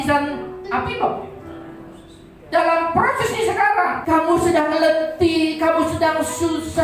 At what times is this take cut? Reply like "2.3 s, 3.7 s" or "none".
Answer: 4.0 s